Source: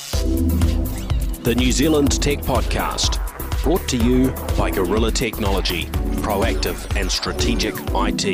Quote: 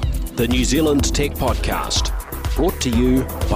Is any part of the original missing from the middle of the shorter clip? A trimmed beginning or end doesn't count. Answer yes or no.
no